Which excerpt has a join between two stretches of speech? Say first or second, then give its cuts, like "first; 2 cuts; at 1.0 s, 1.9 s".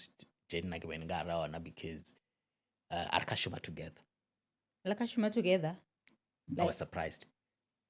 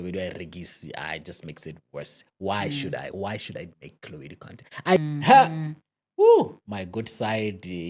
second; 1 cut; at 5.0 s